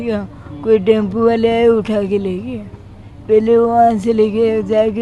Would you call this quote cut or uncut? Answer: uncut